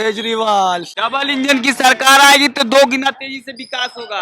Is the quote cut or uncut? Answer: cut